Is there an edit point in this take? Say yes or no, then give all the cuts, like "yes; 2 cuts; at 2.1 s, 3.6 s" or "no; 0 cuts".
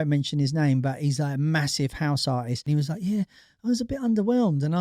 yes; 1 cut; at 2.6 s